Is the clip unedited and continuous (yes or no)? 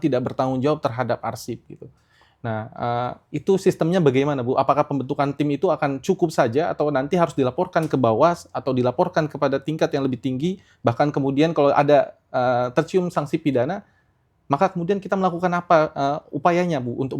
yes